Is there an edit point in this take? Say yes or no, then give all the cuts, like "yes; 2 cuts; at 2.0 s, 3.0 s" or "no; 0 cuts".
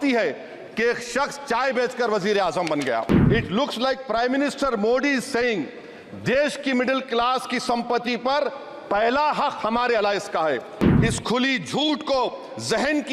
yes; 2 cuts; at 3.1 s, 10.8 s